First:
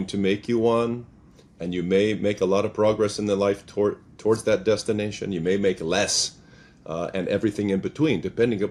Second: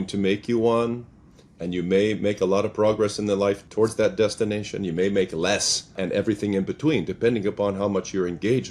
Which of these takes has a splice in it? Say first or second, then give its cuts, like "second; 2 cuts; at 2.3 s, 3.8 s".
second; 2 cuts; at 3.7 s, 5.9 s